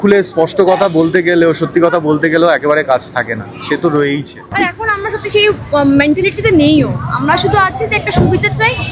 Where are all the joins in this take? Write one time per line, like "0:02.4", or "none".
0:04.5

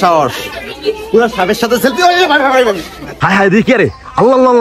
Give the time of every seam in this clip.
0:03.2

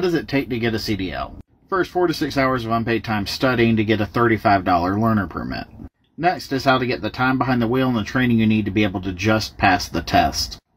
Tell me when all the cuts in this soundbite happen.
0:01.4

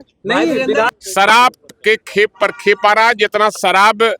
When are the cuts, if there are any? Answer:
0:01.0

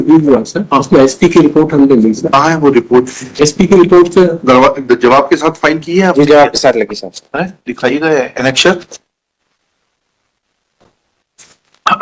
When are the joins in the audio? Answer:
none

